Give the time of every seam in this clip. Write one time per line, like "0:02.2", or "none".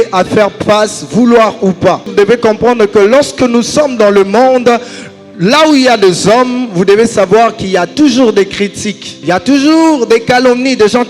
0:02.1
0:09.1